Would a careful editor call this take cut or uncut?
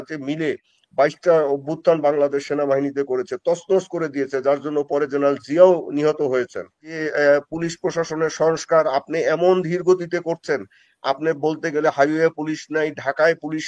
cut